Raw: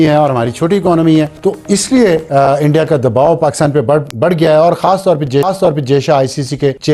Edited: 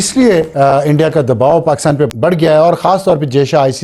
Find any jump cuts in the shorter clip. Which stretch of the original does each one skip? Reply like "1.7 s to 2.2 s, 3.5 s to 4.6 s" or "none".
3.8 s to 4.1 s, 5.0 s to 5.6 s